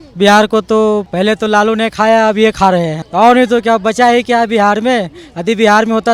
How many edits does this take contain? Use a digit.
2